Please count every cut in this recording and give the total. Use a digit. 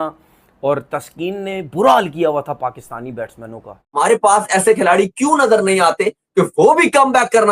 1